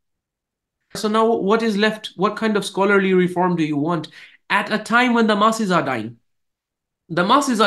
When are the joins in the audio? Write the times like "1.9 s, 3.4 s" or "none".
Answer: 1.0 s